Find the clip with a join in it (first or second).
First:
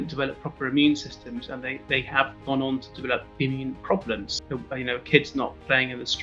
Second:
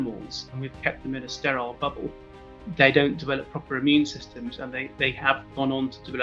first